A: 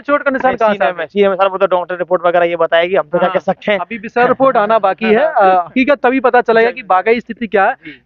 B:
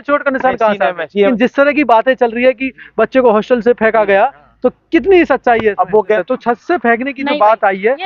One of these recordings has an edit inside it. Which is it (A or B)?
B